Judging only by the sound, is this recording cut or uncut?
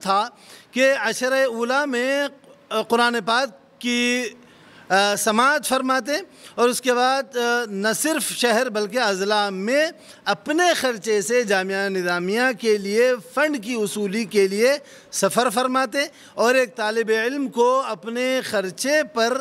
uncut